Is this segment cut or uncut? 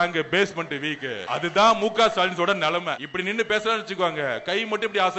cut